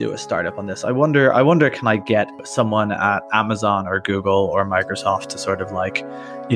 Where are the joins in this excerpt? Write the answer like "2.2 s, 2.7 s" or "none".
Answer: none